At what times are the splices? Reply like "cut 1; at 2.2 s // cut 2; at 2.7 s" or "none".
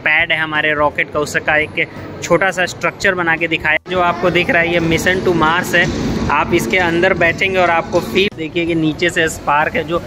cut 1; at 3.8 s // cut 2; at 8.3 s